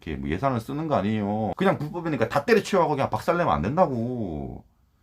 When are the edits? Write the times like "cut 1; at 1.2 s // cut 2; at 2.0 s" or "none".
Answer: cut 1; at 1.5 s